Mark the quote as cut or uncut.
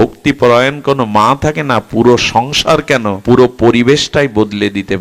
cut